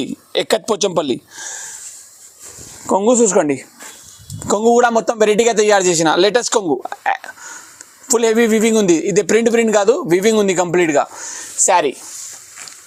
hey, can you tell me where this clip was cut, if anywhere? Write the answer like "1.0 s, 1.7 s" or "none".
none